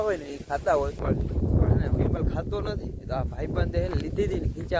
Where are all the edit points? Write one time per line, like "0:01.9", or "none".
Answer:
0:01.0